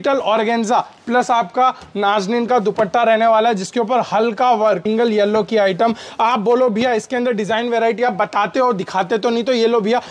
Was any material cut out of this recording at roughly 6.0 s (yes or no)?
no